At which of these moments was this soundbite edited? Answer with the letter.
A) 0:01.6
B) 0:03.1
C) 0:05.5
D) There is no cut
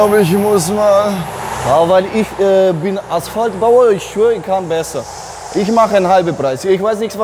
A